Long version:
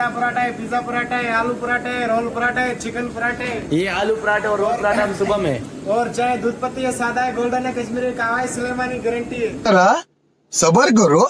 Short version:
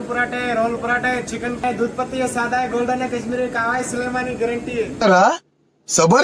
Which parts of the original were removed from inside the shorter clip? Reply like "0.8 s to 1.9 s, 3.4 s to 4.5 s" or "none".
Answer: 3.2 s to 6.3 s